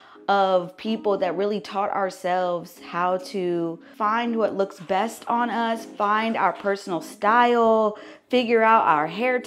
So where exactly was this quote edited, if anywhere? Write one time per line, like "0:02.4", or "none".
0:03.8

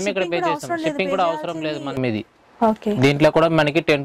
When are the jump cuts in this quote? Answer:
0:02.0

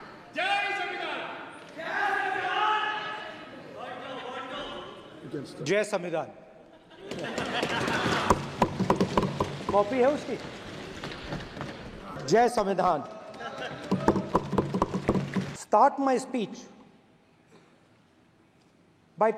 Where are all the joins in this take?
0:12.2
0:15.5

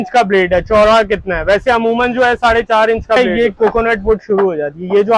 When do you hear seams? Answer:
0:03.2

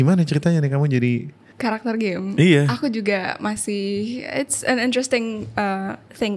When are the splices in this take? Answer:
0:01.4

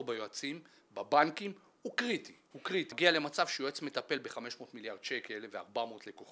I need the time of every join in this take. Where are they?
0:02.9

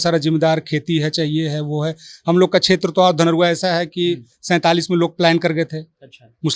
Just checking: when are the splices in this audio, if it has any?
none

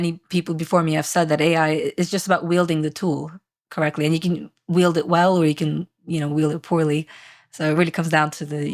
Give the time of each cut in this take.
none

